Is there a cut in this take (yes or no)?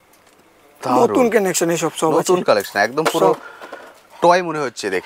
no